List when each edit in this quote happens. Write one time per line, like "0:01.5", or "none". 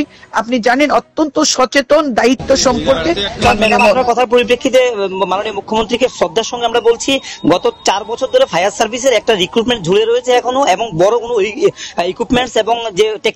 0:03.4